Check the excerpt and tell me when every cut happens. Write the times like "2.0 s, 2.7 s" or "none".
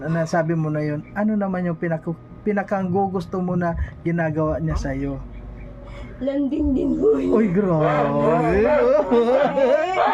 none

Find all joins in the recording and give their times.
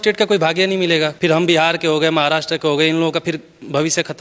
1.1 s

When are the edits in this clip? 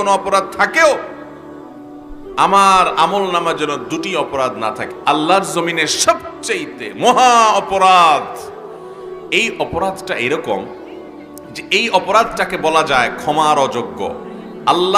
4.9 s

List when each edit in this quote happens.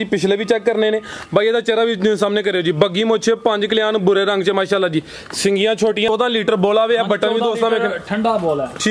6.1 s

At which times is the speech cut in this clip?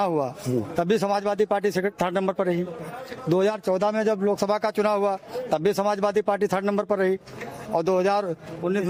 none

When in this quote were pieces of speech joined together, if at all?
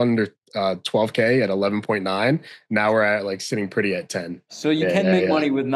4.5 s

